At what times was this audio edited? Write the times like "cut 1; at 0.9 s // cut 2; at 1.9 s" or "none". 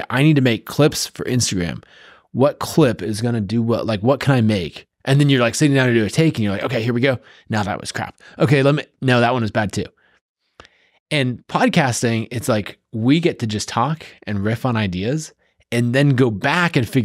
none

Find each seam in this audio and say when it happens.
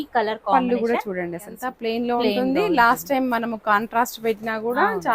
cut 1; at 1.7 s

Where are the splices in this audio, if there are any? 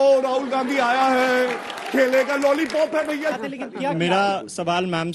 cut 1; at 3.4 s

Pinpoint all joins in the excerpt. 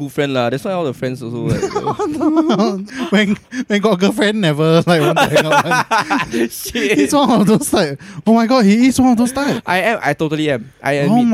none

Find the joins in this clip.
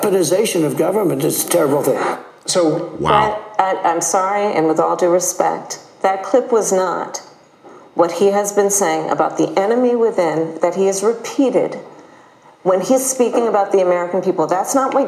none

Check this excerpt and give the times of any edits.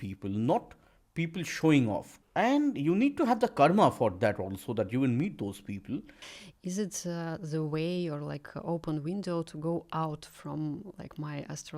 cut 1; at 2.2 s // cut 2; at 6.2 s

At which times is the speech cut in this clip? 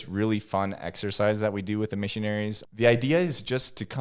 cut 1; at 2.6 s

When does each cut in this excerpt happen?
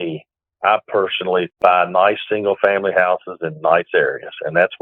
cut 1; at 1.5 s

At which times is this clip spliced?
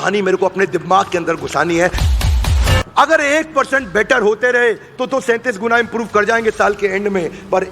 cut 1; at 2.3 s

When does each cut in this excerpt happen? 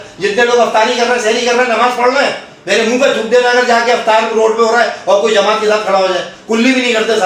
none

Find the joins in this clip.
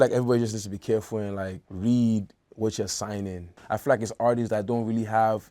cut 1; at 1.6 s // cut 2; at 3.5 s

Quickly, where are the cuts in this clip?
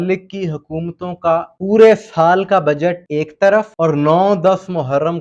cut 1; at 1.5 s // cut 2; at 3.0 s // cut 3; at 3.7 s

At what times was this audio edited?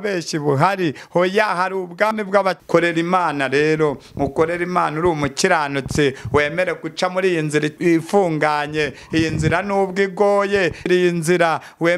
cut 1; at 2.3 s // cut 2; at 7.8 s // cut 3; at 10.9 s

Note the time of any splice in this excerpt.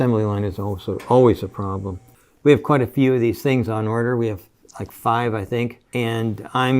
cut 1; at 2.0 s // cut 2; at 5.8 s

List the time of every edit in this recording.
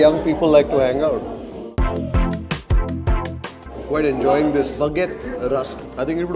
cut 1; at 1.7 s // cut 2; at 3.7 s

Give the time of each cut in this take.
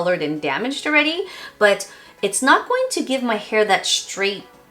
none

